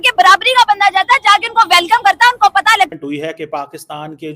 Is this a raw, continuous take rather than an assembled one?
no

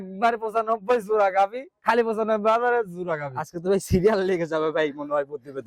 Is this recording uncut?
no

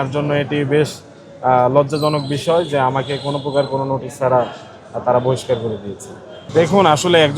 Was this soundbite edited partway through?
yes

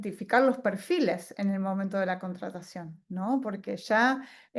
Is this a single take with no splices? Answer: yes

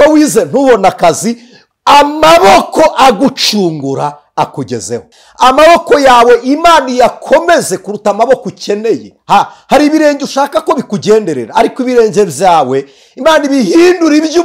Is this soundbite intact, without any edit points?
no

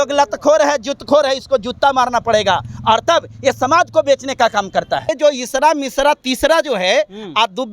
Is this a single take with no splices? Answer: no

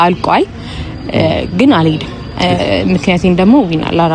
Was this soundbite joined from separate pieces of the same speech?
no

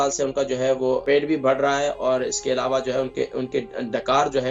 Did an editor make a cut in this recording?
yes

